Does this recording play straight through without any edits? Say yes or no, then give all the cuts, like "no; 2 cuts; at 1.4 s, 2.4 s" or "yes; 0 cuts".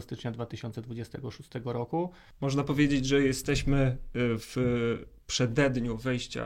no; 1 cut; at 2.2 s